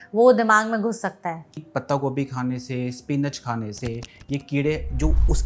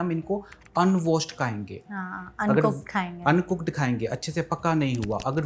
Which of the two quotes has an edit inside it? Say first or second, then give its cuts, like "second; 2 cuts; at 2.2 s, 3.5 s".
first; 1 cut; at 1.6 s